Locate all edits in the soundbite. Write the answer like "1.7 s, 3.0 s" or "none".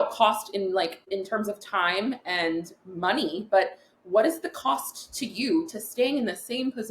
1.0 s